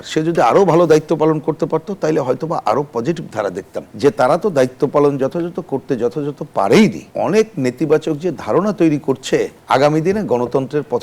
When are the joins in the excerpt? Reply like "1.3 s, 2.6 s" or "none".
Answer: 3.9 s, 7.1 s, 9.6 s